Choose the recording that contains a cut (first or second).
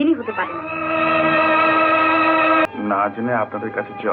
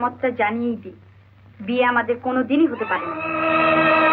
first